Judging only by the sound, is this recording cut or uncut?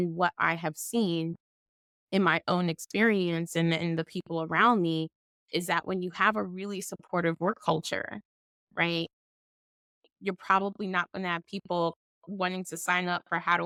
uncut